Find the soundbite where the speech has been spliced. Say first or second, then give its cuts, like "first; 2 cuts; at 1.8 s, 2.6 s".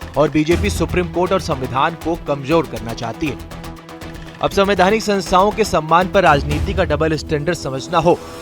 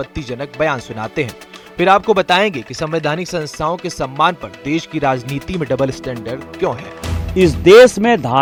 first; 1 cut; at 1.7 s